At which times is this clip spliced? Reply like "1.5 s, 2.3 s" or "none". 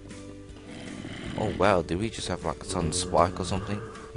3.0 s

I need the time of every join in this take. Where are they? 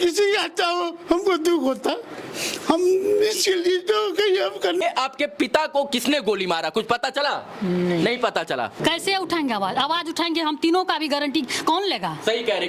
4.8 s, 8.8 s

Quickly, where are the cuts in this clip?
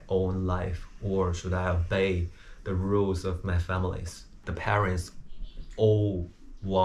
4.4 s

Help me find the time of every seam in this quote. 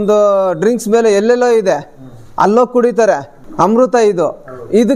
3.4 s

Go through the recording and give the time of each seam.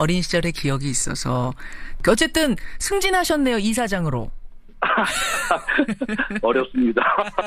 2.0 s

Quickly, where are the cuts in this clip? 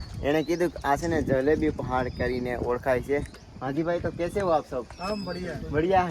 none

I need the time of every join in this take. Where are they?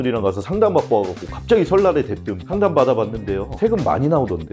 none

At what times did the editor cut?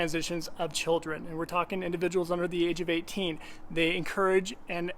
none

